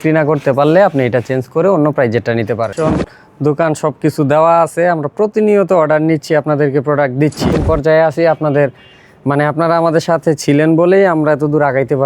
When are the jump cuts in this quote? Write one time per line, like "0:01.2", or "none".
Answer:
0:02.7
0:07.5